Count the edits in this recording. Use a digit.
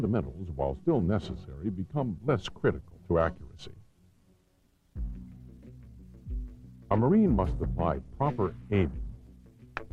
1